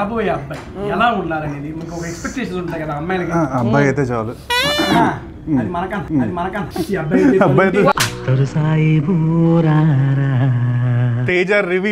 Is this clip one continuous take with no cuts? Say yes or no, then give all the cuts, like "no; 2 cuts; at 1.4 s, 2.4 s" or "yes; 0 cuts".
no; 2 cuts; at 6.6 s, 11.0 s